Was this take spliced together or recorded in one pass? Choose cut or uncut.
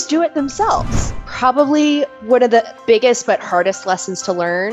cut